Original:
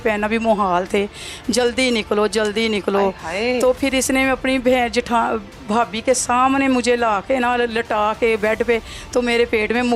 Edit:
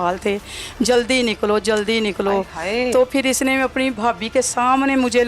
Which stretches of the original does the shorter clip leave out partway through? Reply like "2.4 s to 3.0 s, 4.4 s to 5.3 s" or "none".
4.6 s to 5.6 s